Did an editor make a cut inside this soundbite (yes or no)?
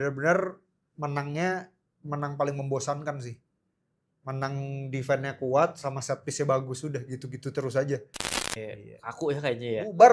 yes